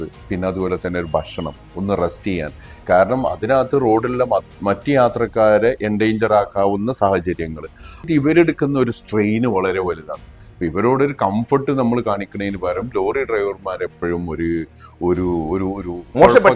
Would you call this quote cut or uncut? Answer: cut